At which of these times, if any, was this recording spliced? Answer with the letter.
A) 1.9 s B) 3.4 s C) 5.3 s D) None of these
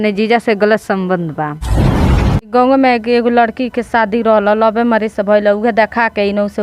A